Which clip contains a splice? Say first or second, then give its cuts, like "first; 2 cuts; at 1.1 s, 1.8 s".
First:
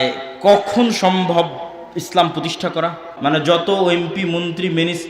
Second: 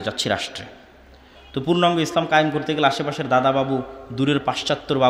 first; 1 cut; at 3.1 s